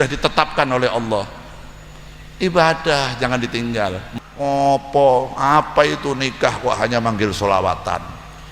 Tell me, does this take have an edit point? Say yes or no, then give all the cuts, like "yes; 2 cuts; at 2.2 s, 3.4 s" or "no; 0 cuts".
yes; 1 cut; at 4.0 s